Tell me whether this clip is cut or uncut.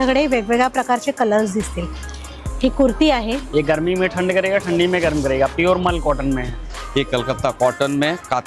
cut